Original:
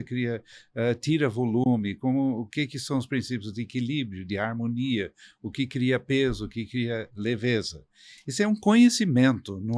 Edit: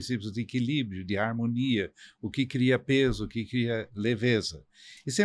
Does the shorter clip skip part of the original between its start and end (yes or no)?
no